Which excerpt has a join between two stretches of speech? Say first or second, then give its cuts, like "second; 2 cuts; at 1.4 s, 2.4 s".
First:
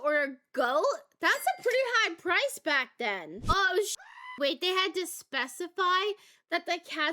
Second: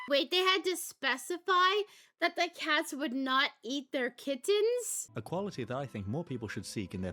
first; 1 cut; at 3.3 s